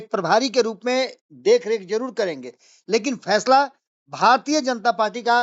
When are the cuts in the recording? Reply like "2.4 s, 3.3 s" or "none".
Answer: none